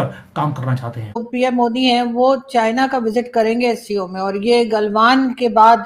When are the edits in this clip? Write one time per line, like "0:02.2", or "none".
0:01.3